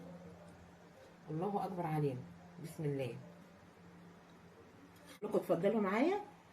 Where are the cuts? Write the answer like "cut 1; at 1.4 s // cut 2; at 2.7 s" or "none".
cut 1; at 5.3 s

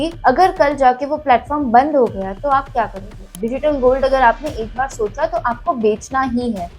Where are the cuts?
cut 1; at 3.3 s

